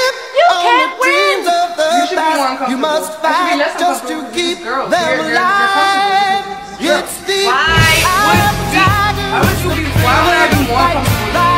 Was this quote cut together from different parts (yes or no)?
no